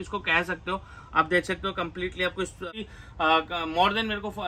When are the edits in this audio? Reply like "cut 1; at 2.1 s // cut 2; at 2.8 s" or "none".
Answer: cut 1; at 2.7 s